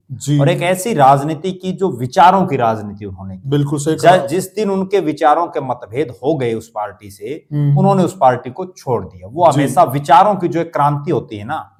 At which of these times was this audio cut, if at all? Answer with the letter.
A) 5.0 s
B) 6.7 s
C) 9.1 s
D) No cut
D